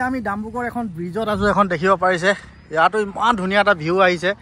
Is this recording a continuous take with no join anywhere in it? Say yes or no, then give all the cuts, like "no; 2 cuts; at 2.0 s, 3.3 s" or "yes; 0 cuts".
yes; 0 cuts